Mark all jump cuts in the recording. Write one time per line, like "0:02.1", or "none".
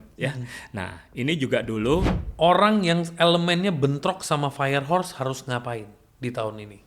0:02.2